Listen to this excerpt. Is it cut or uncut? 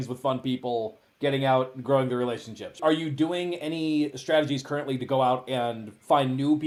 uncut